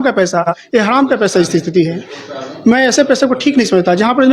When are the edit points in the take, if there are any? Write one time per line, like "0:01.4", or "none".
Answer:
none